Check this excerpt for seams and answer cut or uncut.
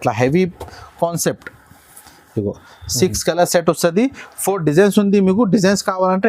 uncut